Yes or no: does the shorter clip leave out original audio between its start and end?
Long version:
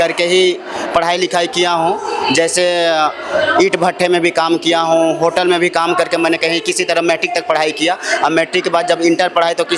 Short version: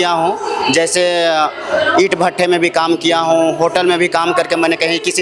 no